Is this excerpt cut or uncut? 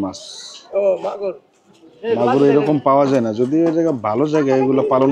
uncut